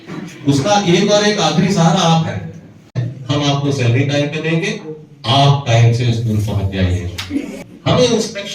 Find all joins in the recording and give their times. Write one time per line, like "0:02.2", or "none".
0:03.1
0:07.5